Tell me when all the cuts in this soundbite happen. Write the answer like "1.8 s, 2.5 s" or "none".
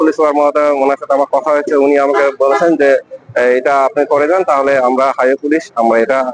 none